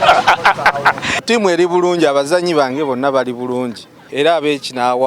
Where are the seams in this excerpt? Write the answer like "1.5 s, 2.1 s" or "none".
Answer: 1.2 s, 4.0 s